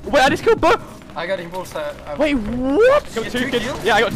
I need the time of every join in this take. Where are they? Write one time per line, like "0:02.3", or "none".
0:03.2